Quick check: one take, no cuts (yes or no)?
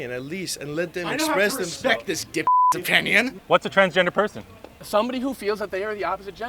no